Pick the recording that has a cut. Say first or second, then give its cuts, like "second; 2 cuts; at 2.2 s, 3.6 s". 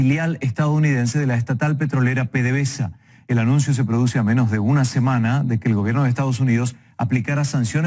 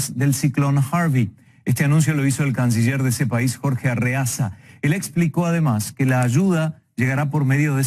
first; 1 cut; at 4.6 s